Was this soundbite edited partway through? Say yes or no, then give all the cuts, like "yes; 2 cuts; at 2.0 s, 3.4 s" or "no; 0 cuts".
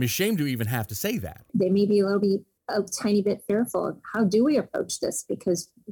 yes; 1 cut; at 1.5 s